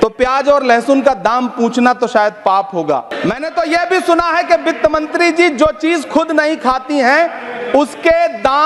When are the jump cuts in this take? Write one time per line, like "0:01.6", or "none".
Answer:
0:03.1